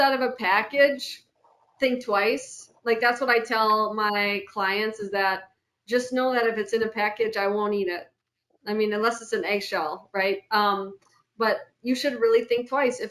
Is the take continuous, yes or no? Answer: yes